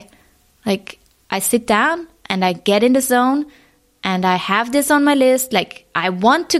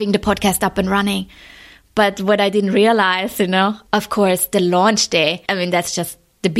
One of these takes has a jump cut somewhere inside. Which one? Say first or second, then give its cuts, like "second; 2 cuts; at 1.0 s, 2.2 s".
second; 2 cuts; at 3.8 s, 5.4 s